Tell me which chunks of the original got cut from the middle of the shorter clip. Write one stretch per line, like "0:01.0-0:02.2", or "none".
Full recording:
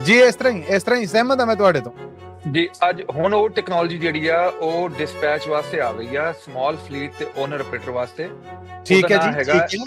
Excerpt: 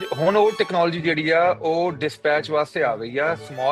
none